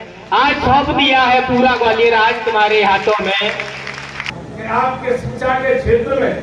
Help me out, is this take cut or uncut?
cut